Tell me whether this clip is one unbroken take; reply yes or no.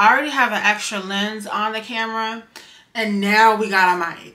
yes